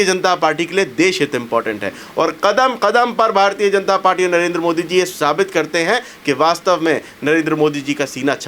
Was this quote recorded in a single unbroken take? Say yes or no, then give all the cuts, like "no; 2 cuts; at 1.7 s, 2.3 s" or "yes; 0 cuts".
yes; 0 cuts